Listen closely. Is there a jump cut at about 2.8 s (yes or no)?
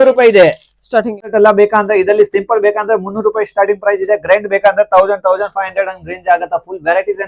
no